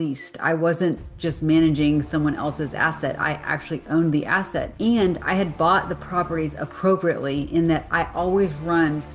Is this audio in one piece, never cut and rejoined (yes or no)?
yes